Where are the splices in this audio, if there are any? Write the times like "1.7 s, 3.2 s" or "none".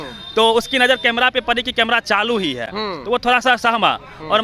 none